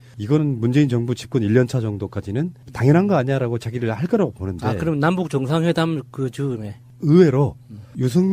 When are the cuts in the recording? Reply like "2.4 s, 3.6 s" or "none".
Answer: 6.8 s